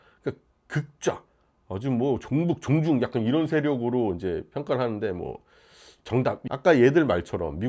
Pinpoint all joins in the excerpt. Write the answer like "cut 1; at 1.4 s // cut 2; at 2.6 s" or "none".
cut 1; at 6.4 s